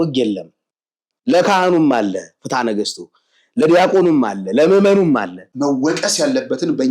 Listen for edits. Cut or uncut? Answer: cut